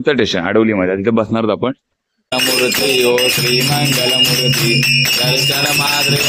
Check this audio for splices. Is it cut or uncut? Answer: cut